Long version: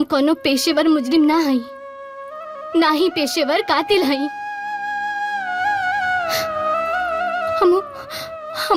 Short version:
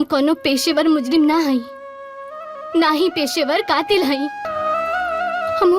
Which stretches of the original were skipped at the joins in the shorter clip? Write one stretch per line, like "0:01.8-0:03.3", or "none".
0:04.5-0:06.5